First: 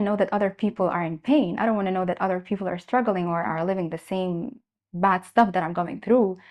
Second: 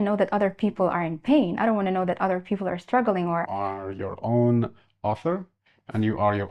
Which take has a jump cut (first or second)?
second